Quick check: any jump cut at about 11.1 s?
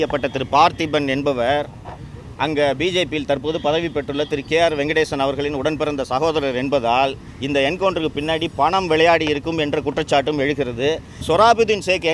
yes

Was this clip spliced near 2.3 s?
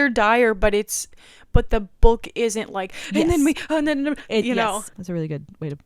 no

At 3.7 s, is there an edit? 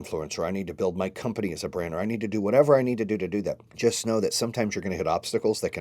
yes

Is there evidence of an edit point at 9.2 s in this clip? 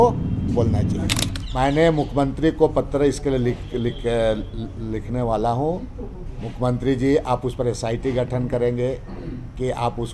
no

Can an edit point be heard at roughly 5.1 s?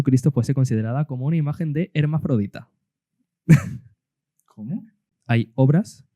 yes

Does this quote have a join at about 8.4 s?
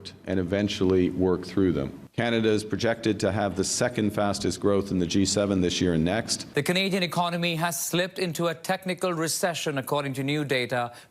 no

